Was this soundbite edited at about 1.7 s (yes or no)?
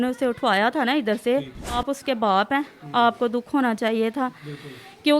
yes